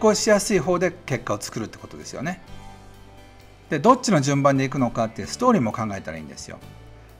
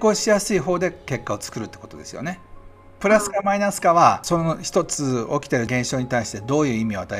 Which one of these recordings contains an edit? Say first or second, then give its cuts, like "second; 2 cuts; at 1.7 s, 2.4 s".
second; 3 cuts; at 2.9 s, 4.2 s, 5.7 s